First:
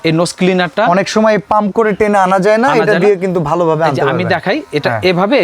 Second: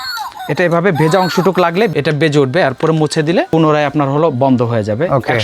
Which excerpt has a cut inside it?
second; 2 cuts; at 1.9 s, 3.5 s

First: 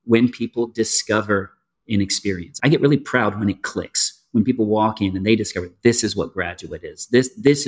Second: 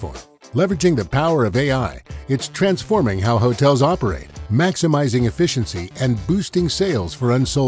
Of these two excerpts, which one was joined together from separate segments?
first; 1 cut; at 2.5 s

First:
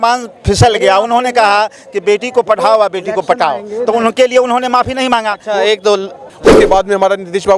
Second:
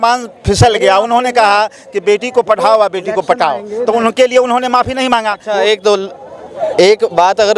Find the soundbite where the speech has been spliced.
first; 1 cut; at 6.4 s

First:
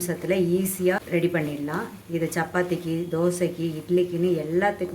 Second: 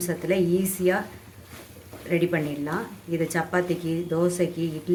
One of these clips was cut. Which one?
first; 1 cut; at 1.0 s

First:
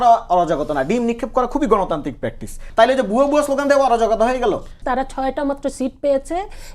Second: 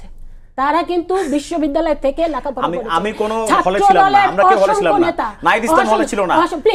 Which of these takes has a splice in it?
first; 2 cuts; at 2.6 s, 4.8 s

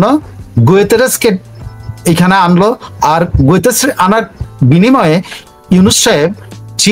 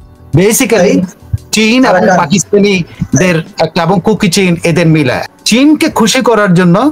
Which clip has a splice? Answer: second; 1 cut; at 5.2 s

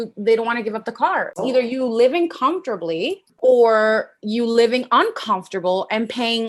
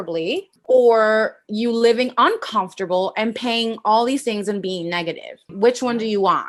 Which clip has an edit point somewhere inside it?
first; 1 cut; at 1.3 s

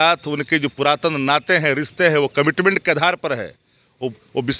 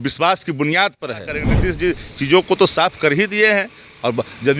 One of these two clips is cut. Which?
second; 1 cut; at 1.5 s

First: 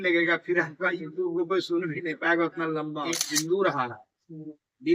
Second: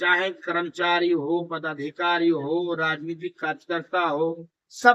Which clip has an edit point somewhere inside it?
first; 1 cut; at 3.0 s

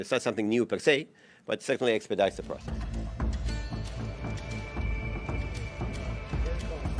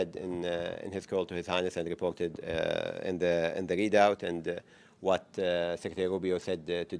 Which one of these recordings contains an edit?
first; 1 cut; at 2.6 s

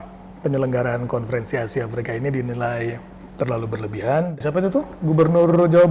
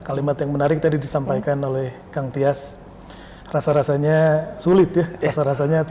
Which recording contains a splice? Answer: first; 1 cut; at 4.3 s

